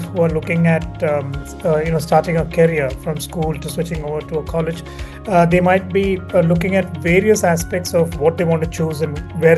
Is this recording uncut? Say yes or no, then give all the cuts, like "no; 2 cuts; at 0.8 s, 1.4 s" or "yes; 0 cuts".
yes; 0 cuts